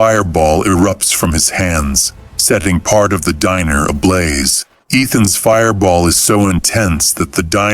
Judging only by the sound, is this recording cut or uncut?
uncut